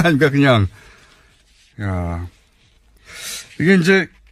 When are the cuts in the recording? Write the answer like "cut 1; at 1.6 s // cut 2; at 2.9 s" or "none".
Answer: none